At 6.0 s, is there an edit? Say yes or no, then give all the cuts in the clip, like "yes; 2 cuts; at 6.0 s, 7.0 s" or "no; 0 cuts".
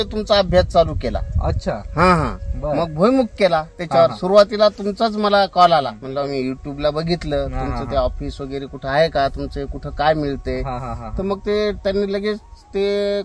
yes; 1 cut; at 6.0 s